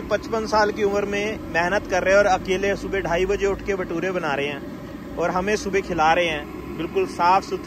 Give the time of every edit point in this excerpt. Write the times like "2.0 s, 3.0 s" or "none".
none